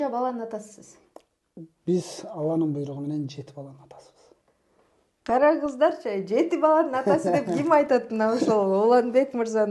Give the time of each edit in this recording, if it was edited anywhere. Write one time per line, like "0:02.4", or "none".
none